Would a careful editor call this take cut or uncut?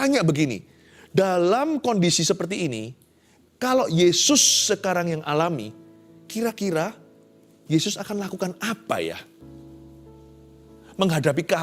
uncut